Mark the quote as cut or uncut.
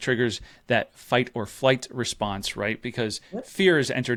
uncut